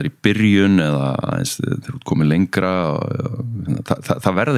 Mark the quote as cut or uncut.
uncut